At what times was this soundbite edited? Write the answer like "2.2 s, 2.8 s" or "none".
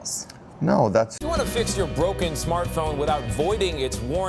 1.2 s